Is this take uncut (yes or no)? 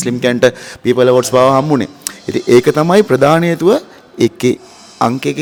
yes